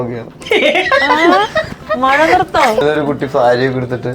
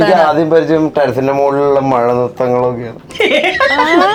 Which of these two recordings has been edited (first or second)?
first